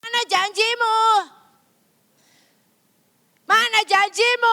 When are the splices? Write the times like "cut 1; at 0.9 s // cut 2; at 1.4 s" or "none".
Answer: none